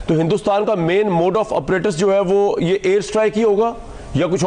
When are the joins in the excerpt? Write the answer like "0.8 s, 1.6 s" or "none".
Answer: none